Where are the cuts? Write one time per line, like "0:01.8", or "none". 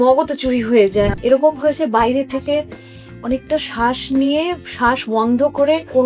0:01.2